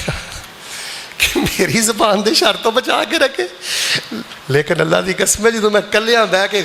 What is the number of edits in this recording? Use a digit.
0